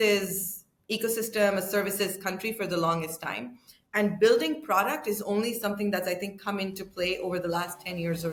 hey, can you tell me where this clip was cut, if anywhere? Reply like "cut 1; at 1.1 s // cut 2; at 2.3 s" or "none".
none